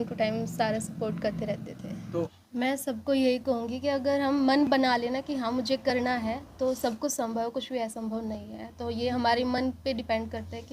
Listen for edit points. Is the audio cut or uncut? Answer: cut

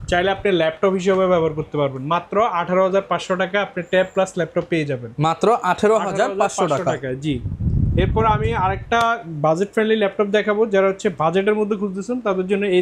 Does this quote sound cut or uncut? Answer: uncut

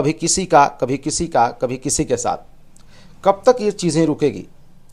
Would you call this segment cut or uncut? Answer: uncut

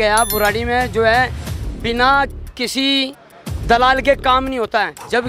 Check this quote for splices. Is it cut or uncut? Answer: uncut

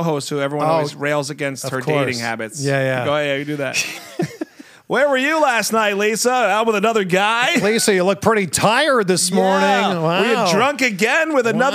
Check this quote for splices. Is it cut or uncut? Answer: uncut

